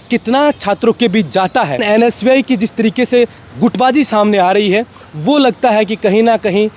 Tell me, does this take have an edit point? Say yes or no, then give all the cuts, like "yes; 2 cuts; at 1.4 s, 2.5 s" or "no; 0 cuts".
yes; 1 cut; at 1.8 s